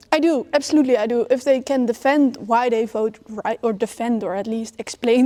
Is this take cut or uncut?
uncut